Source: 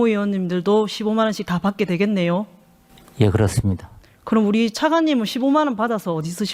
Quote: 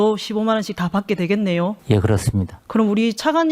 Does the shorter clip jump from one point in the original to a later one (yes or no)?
yes